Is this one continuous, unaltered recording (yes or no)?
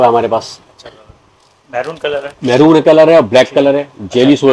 yes